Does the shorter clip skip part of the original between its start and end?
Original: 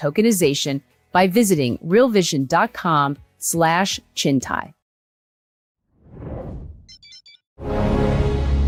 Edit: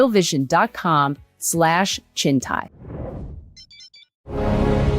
yes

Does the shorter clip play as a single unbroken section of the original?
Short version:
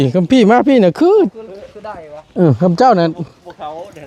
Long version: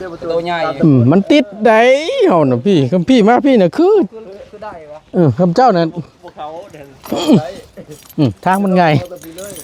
yes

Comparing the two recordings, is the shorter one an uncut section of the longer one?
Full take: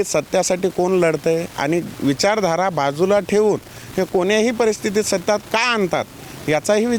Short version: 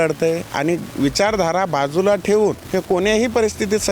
no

